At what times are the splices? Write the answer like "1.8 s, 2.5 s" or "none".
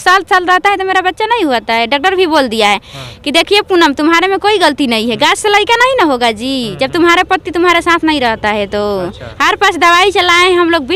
none